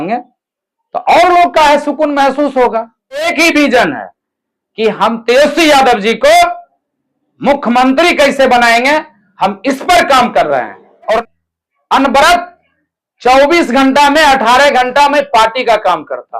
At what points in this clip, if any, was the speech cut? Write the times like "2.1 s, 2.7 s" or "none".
3.3 s, 11.2 s